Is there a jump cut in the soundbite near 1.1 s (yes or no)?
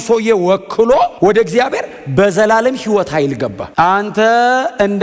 yes